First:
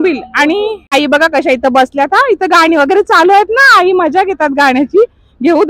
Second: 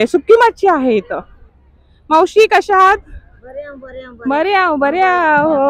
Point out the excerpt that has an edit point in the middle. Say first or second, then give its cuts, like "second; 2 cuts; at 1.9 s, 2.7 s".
first; 1 cut; at 0.9 s